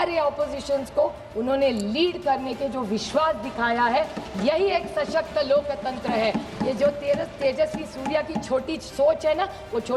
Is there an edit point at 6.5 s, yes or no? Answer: no